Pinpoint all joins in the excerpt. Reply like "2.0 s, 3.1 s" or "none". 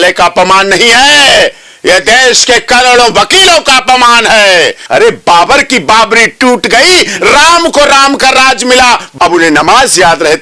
4.8 s, 9.1 s

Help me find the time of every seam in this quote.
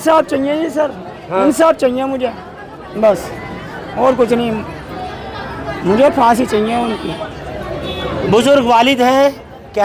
none

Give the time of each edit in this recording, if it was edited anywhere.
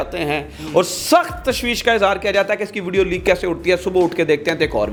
none

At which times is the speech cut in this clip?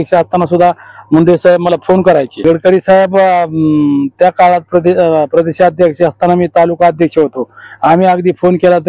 2.3 s

